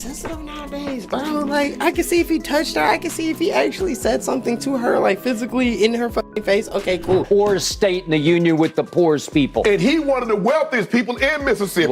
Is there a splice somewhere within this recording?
yes; 1 cut; at 7.2 s

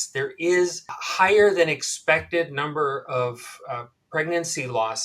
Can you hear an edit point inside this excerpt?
yes; 1 cut; at 1.0 s

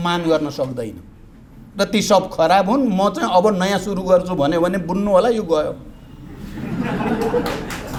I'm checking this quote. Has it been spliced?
no; 0 cuts

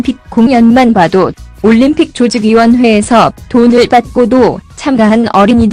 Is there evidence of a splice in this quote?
no; 0 cuts

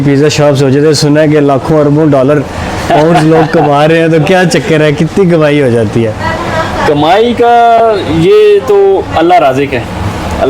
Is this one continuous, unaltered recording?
yes; 0 cuts

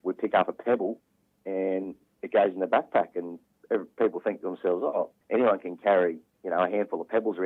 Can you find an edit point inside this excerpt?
no; 0 cuts

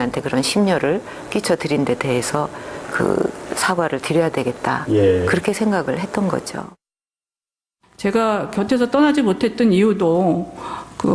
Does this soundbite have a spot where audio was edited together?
yes; 1 cut; at 2.9 s

